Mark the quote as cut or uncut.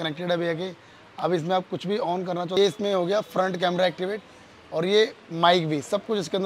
cut